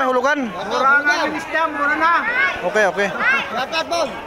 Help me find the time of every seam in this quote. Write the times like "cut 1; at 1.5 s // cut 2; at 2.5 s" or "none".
none